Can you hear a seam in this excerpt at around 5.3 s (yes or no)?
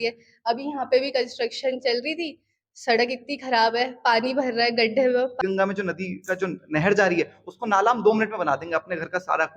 yes